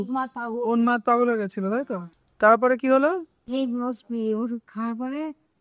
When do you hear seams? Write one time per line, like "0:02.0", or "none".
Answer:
0:02.0
0:03.4